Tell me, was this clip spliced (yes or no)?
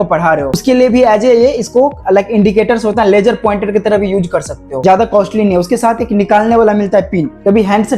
yes